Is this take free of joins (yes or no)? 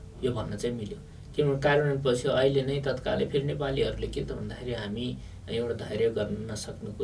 yes